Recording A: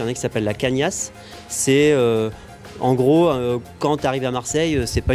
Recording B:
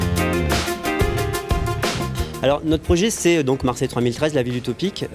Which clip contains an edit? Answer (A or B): A